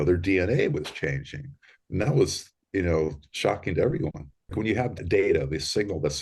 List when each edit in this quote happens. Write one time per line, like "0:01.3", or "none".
0:04.6